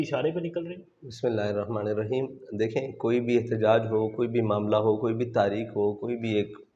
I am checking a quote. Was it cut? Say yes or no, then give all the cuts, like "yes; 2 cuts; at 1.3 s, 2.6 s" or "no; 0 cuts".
no; 0 cuts